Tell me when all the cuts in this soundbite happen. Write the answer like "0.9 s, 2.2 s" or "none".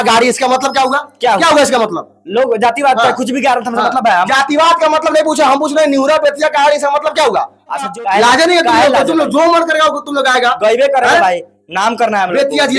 7.9 s

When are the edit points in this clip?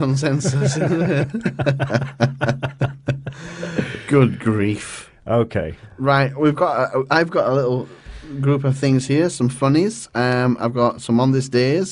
7.2 s

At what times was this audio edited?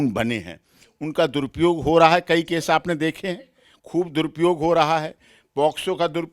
none

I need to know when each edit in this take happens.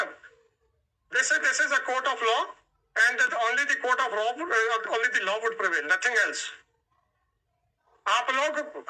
none

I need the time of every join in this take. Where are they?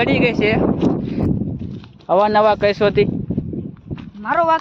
1.2 s

